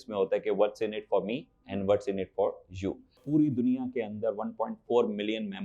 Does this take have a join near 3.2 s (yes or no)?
yes